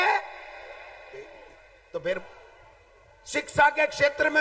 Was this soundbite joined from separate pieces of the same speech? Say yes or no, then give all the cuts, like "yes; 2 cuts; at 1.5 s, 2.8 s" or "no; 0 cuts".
yes; 1 cut; at 2.2 s